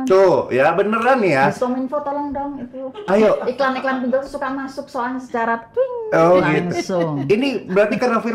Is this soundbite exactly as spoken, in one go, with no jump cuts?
yes; 0 cuts

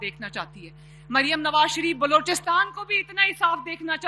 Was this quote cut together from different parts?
no; 0 cuts

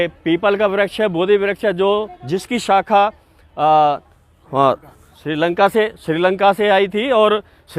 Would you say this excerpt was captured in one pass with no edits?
yes; 0 cuts

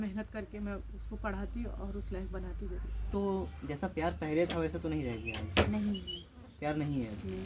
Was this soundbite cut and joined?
yes; 1 cut; at 3.1 s

